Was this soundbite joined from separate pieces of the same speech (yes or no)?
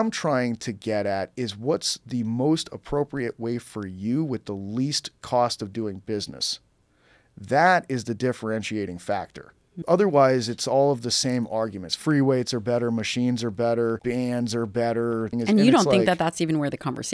yes